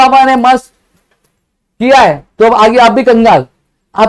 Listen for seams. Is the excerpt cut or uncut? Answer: uncut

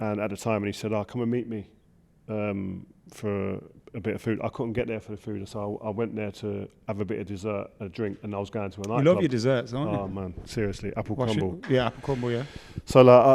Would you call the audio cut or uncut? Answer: uncut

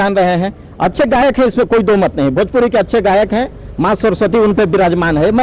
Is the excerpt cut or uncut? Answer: uncut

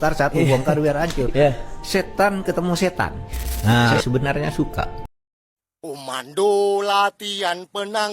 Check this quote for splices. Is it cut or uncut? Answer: cut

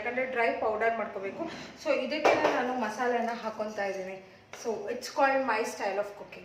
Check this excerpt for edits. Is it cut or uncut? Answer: uncut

